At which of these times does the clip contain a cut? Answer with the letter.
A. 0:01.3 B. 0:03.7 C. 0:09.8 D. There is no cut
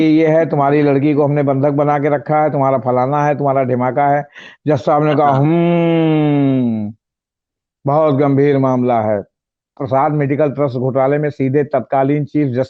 C